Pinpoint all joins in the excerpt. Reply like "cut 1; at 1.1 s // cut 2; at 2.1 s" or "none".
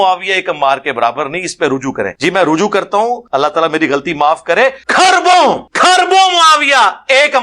cut 1; at 2.1 s // cut 2; at 3.2 s // cut 3; at 4.8 s // cut 4; at 5.7 s